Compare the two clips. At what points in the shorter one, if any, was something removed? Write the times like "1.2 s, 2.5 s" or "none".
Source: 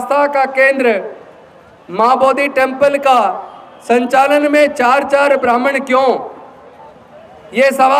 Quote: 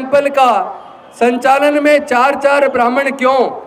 none